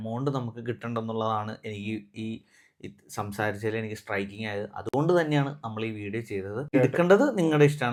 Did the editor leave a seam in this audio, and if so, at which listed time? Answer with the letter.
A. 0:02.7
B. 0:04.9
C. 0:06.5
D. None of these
D